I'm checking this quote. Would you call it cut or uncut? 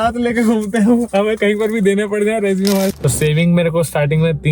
cut